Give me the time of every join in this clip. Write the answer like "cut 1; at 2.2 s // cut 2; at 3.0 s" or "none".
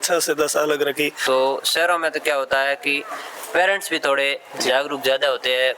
cut 1; at 1.2 s